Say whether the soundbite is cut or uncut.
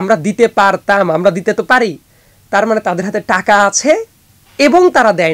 uncut